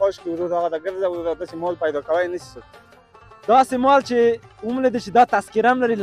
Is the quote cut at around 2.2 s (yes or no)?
no